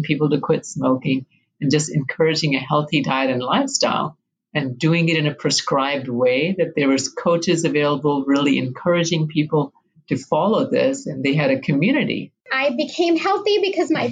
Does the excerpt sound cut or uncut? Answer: cut